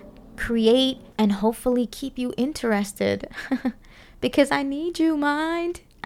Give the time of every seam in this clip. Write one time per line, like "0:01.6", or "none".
0:01.0

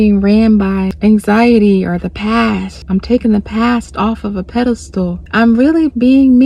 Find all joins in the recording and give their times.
0:00.9
0:02.7
0:05.2

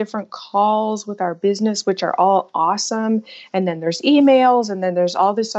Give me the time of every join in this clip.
none

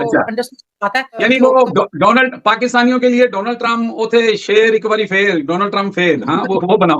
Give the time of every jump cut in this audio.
0:01.2

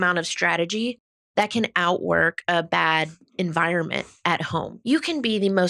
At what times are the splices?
0:04.7

